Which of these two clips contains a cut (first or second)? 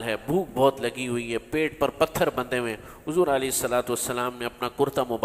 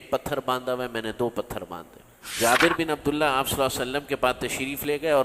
second